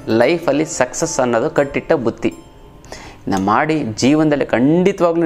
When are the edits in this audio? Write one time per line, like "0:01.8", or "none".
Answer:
0:02.9